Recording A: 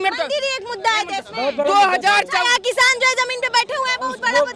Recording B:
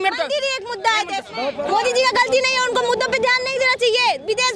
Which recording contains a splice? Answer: B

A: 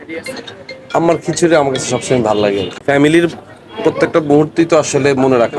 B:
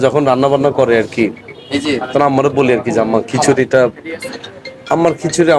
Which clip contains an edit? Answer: A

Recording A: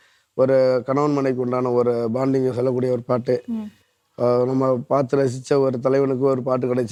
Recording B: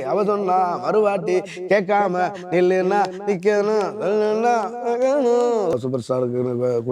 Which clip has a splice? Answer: B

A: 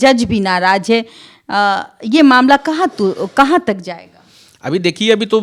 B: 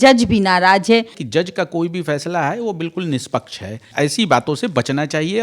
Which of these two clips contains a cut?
B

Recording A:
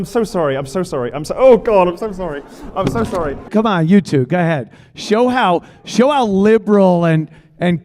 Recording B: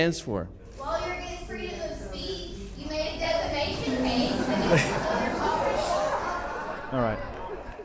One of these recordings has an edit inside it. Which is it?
A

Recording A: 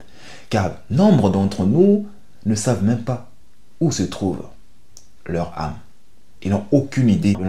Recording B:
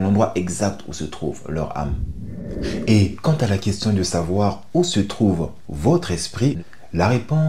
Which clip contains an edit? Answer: B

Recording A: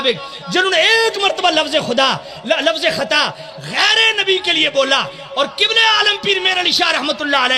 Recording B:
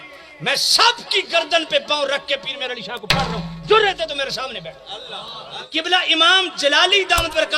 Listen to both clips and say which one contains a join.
B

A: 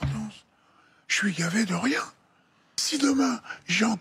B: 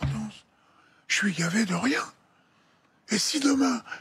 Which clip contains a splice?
A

